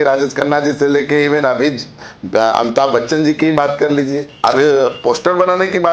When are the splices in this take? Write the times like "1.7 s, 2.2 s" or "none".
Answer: 4.3 s